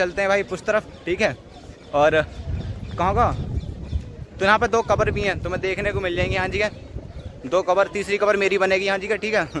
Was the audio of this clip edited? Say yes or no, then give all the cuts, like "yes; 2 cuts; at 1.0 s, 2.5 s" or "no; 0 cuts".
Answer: no; 0 cuts